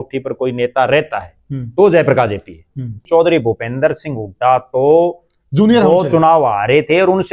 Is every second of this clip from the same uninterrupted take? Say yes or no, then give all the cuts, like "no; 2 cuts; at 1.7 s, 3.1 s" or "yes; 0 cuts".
no; 1 cut; at 3.0 s